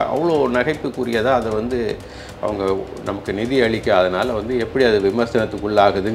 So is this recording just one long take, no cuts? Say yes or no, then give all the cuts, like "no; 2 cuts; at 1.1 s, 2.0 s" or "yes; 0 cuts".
yes; 0 cuts